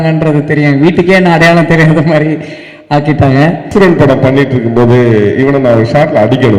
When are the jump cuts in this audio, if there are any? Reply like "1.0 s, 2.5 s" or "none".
3.7 s